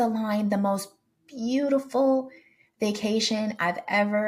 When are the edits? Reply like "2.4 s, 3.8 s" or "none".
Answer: none